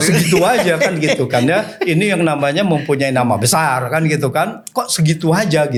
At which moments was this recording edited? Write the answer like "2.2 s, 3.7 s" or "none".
none